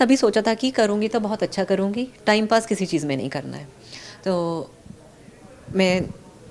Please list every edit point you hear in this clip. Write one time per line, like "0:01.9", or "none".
none